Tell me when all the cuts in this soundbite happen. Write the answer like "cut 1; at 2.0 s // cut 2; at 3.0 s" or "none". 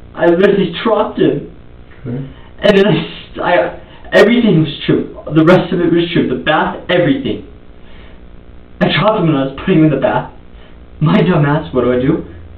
none